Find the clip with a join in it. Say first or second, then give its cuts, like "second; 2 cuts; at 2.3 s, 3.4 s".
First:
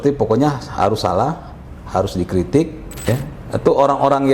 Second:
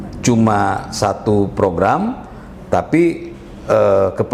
first; 1 cut; at 2.9 s